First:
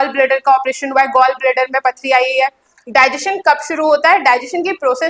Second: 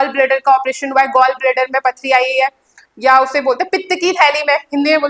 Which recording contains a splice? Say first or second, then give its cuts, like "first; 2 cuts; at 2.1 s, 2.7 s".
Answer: first; 1 cut; at 2.8 s